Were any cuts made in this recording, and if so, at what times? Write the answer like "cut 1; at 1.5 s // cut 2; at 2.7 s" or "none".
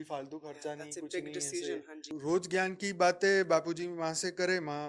cut 1; at 2.1 s